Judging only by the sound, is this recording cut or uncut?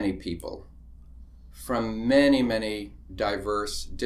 uncut